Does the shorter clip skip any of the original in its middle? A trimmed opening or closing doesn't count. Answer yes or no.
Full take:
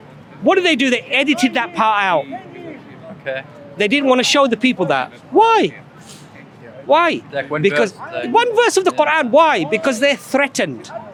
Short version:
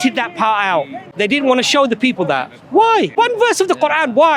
yes